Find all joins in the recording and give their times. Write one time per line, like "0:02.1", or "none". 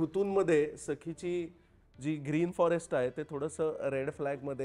none